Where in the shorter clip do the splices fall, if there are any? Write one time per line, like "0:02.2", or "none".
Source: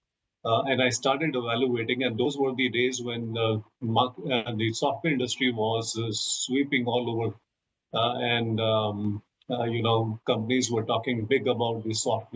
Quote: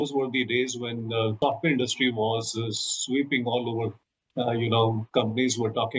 0:01.4
0:04.2

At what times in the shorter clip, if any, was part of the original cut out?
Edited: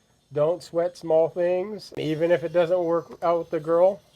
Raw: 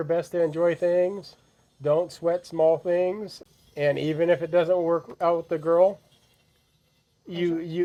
0:02.0

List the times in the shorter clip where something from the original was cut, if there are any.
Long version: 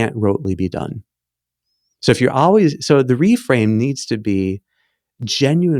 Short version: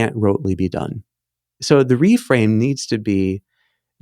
0:01.6

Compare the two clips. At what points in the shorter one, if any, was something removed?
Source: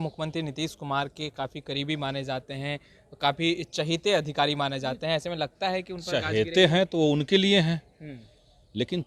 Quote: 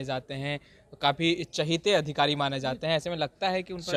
none

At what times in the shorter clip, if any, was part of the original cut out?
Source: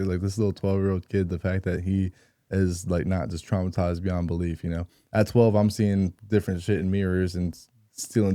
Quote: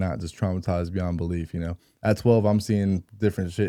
none

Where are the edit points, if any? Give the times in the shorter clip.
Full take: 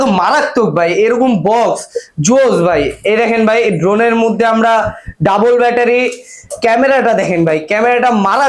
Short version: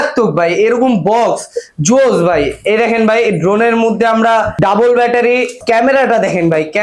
0:04.5
0:05.5

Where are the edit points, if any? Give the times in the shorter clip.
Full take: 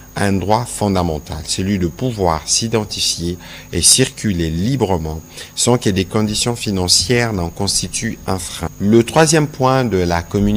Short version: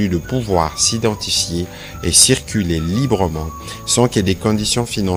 none

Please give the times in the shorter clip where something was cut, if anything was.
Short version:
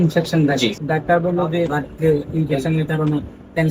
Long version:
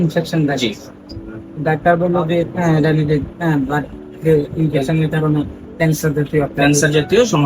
0:00.8
0:01.8

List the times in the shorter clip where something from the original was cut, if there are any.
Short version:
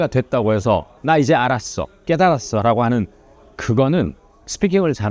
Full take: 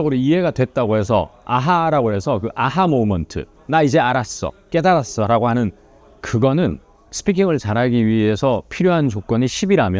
0:00.9

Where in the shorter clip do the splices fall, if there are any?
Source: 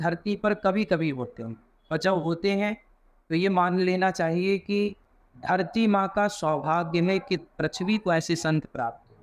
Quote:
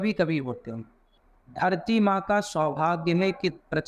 0:01.1

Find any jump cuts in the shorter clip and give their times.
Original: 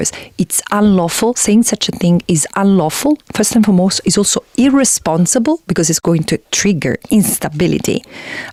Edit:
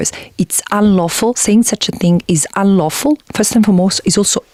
none

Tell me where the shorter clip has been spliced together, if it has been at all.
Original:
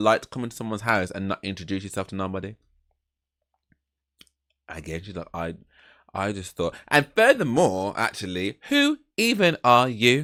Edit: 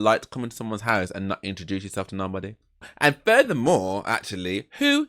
0:02.9

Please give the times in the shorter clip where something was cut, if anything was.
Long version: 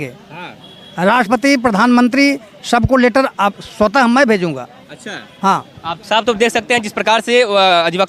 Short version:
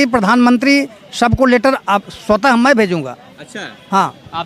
none

